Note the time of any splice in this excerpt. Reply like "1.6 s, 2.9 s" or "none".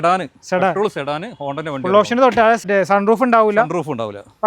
2.6 s